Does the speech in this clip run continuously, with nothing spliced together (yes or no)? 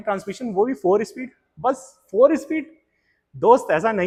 yes